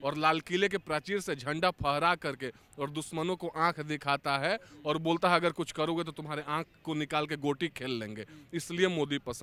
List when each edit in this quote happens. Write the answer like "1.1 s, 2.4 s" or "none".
none

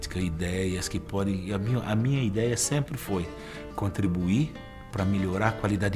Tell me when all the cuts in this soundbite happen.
none

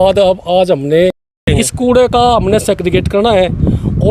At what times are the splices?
1.4 s

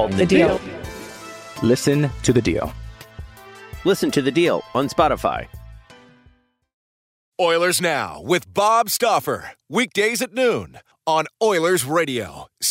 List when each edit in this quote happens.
7.1 s

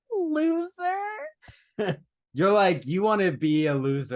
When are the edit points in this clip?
2.0 s

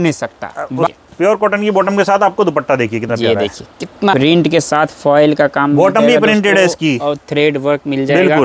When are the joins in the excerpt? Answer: 0.9 s, 4.1 s

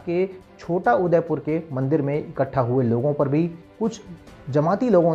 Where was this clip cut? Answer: 3.6 s

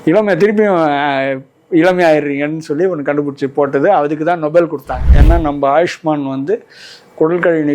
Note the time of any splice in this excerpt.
5.0 s

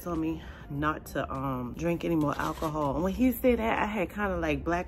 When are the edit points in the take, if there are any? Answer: 1.7 s

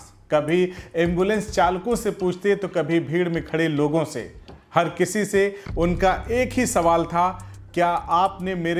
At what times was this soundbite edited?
none

